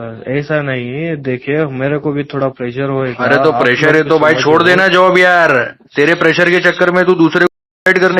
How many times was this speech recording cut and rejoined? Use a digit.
0